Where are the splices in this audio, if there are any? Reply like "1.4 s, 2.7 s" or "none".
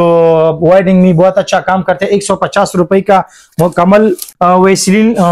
4.2 s